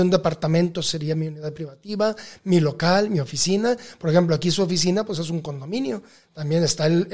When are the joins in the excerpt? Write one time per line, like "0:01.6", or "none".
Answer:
none